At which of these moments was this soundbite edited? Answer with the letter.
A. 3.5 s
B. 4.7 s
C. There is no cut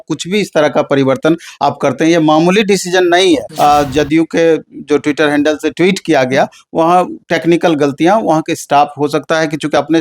A